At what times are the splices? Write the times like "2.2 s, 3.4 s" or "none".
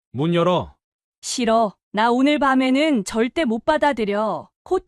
none